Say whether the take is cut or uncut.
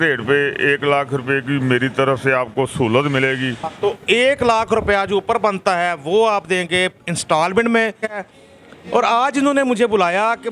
cut